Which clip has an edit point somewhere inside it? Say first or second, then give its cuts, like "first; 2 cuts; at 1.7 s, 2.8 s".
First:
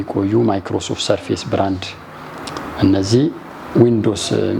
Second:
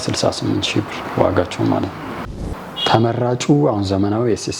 second; 1 cut; at 2.3 s